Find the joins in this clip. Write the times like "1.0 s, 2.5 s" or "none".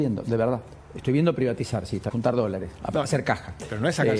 2.0 s